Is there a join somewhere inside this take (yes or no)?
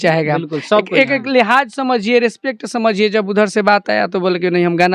no